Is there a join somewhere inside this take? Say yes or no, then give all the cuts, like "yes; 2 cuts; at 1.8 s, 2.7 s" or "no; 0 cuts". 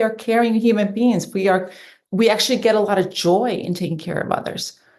no; 0 cuts